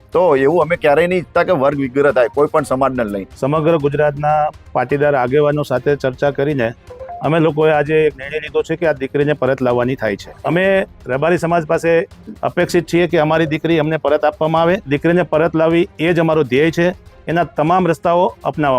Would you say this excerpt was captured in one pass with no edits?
no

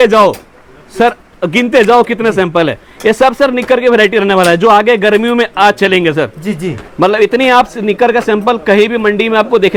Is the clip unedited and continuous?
yes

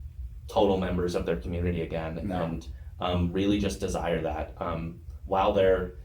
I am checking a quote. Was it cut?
no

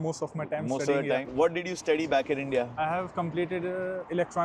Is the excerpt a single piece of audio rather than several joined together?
yes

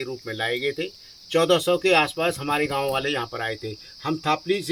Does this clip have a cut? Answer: no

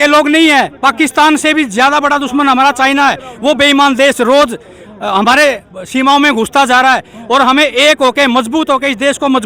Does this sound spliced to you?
no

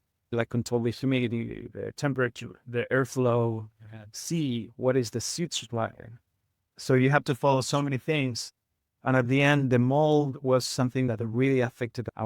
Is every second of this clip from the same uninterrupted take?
no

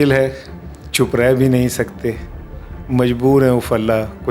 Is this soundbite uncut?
yes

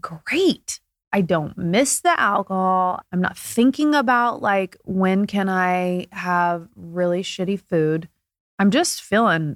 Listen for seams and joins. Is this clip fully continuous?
no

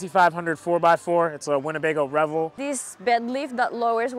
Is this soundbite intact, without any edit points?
no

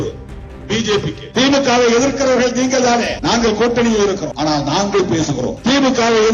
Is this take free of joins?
no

